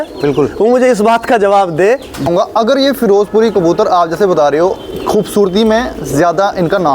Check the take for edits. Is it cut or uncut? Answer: cut